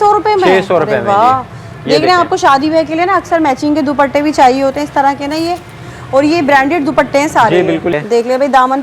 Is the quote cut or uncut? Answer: cut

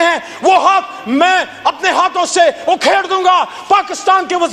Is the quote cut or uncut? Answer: uncut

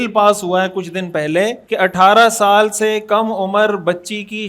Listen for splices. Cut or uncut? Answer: cut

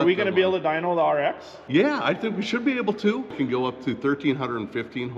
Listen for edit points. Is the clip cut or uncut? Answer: cut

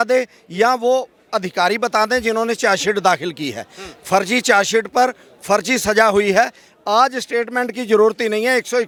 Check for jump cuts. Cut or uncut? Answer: uncut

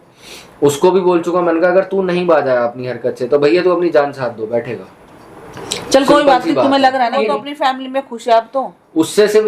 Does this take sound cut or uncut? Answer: cut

